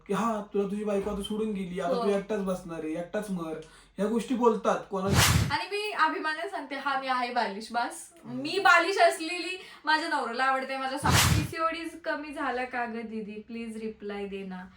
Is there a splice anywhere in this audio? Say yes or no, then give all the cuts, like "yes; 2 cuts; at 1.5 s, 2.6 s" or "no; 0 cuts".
yes; 2 cuts; at 5.2 s, 11.1 s